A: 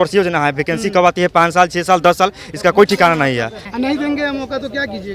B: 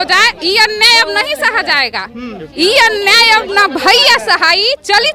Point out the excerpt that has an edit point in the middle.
A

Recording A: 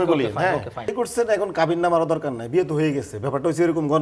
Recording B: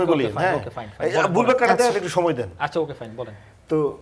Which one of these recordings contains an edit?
A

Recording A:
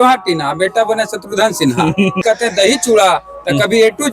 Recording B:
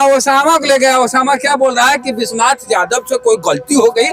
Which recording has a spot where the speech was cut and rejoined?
A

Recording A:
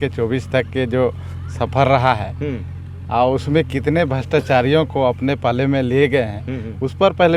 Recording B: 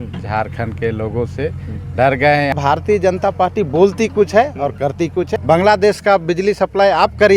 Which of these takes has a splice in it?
B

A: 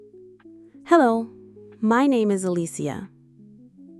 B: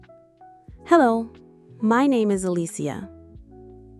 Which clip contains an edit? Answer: B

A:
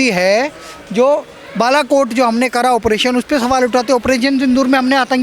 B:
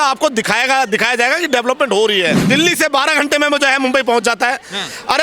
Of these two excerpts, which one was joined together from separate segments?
B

